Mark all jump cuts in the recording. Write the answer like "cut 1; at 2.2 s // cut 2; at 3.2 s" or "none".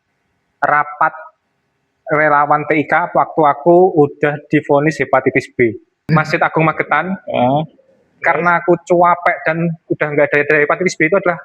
cut 1; at 6.1 s